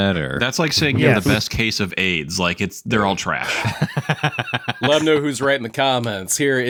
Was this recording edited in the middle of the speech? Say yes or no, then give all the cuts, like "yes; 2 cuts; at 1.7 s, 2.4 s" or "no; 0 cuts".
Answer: no; 0 cuts